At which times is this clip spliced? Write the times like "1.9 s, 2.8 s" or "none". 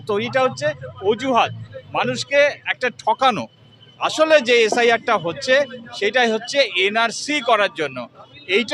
none